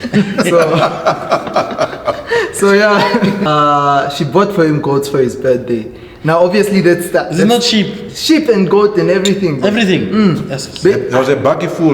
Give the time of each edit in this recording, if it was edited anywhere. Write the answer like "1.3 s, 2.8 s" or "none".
3.5 s